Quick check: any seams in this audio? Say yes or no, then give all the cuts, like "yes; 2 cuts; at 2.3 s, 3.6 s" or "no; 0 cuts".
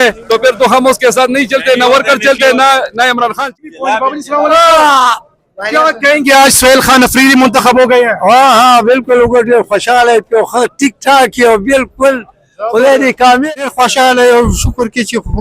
yes; 2 cuts; at 3.5 s, 13.5 s